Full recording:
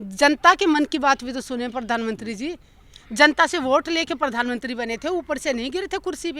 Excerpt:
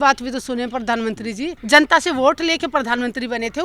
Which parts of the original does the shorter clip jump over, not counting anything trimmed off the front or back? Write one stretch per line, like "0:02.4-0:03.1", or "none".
0:02.6-0:03.1